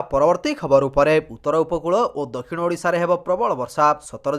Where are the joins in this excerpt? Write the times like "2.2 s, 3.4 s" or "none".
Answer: 1.3 s